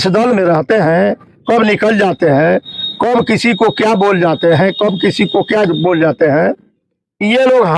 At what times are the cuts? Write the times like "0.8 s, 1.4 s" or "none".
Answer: none